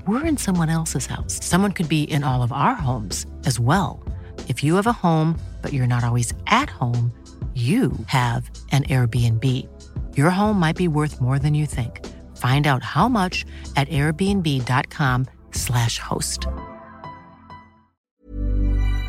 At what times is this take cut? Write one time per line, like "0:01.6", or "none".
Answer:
0:18.1